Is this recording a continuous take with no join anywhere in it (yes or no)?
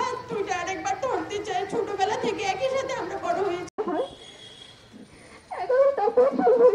no